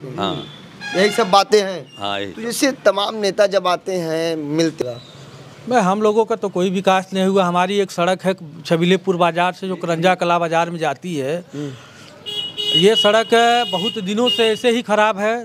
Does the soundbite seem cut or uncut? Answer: cut